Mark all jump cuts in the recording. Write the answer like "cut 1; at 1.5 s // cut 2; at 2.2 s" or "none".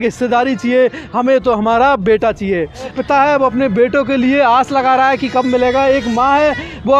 cut 1; at 2.9 s